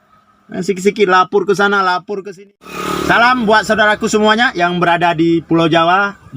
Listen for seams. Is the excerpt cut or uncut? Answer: cut